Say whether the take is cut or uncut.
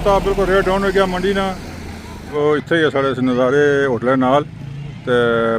cut